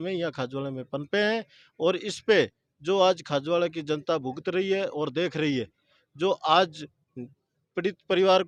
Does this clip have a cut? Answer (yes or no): no